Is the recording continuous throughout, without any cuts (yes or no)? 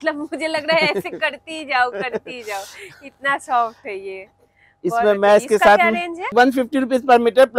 yes